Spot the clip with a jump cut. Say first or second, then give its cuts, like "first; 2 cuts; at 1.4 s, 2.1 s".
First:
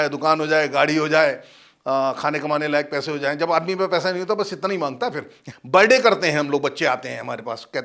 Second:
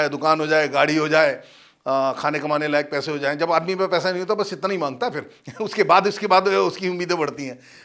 first; 1 cut; at 5.5 s